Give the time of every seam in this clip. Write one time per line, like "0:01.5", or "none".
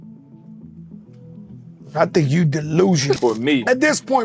0:03.2